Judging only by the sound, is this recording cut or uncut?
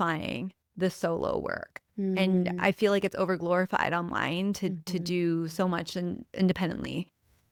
uncut